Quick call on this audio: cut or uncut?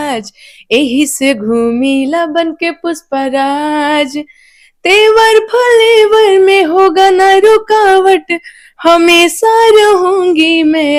uncut